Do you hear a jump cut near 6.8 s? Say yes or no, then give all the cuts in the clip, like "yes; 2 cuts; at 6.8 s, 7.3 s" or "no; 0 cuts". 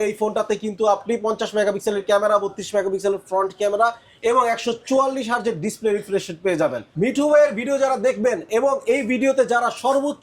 yes; 1 cut; at 6.8 s